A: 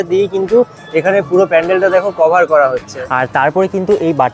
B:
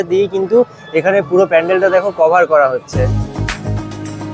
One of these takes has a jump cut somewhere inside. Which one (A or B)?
A